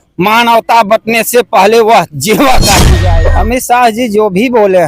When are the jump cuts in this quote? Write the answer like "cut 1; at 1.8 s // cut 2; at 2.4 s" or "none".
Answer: cut 1; at 2.9 s